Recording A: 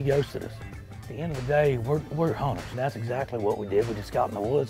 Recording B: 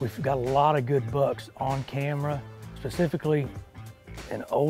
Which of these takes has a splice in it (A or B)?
A